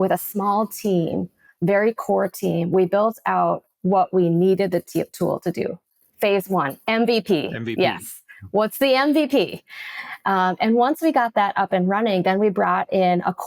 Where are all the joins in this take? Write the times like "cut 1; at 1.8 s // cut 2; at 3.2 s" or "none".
none